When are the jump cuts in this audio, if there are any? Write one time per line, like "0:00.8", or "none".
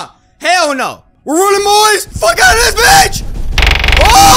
0:01.1
0:02.1